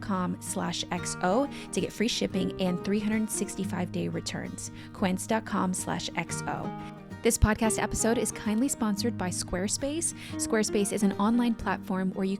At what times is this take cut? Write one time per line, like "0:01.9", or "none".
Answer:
0:06.8